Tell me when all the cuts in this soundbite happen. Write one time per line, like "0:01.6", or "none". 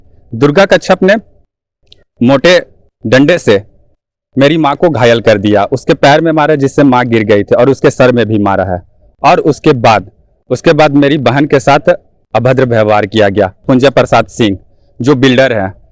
0:13.6